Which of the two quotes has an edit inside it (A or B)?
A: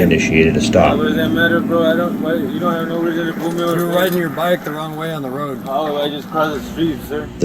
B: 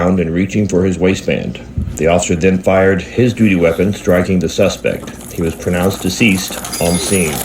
A